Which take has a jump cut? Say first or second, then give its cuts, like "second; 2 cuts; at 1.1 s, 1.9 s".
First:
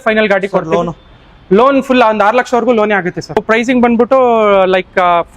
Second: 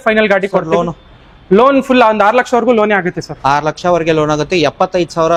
first; 1 cut; at 3.4 s